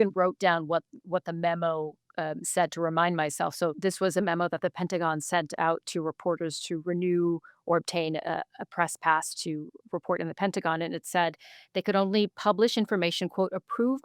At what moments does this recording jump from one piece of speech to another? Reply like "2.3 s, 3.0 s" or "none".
3.8 s